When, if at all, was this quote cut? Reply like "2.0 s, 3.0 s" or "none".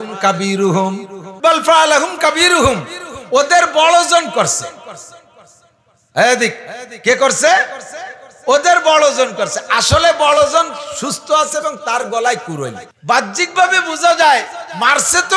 1.2 s, 12.9 s